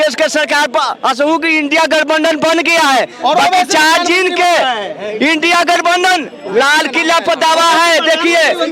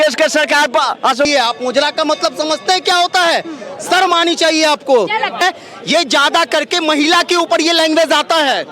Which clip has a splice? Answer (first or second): second